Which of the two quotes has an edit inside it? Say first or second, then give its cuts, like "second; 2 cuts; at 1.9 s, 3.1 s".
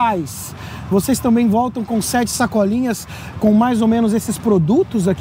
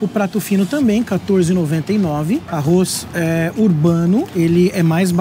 second; 2 cuts; at 2.5 s, 4.3 s